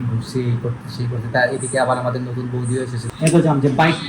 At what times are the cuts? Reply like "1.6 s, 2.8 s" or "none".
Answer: 3.0 s